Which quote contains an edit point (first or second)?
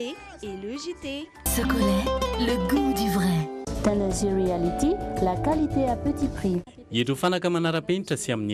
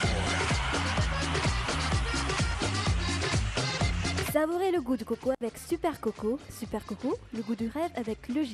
first